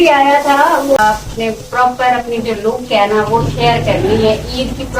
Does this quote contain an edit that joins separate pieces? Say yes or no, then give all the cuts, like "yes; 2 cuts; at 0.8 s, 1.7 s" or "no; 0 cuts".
yes; 1 cut; at 1.0 s